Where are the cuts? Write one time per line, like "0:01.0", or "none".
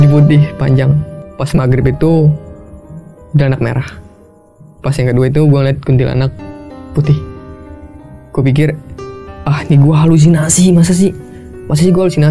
0:01.1

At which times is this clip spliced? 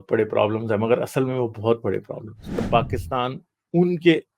0:02.6

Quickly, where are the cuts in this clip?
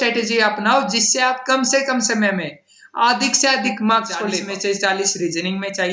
0:04.4

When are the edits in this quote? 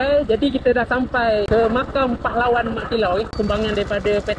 0:01.5
0:03.3

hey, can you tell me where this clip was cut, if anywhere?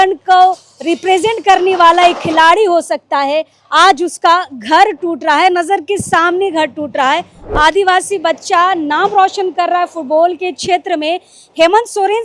0:07.4

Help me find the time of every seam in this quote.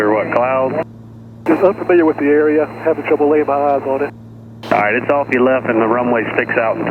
none

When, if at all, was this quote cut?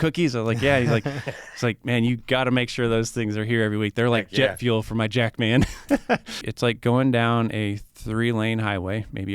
0:06.5

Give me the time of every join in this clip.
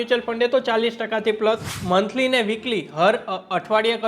0:01.7

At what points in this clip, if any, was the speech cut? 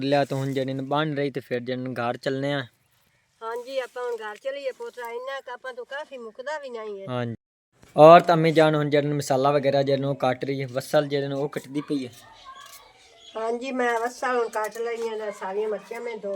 0:07.4

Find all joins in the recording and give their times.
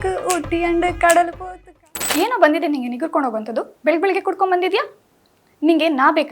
0:01.4

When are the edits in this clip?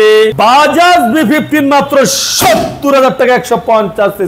none

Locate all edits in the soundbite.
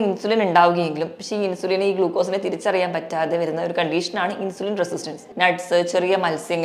0:05.2

